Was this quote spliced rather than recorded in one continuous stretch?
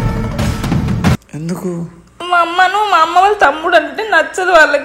no; 0 cuts

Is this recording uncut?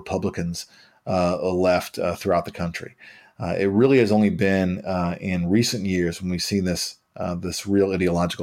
yes; 0 cuts

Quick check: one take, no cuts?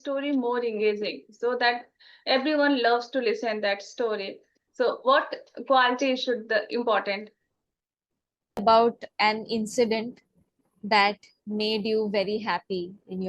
no; 1 cut; at 8.6 s

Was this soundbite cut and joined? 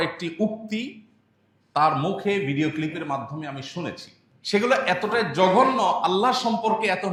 no; 0 cuts

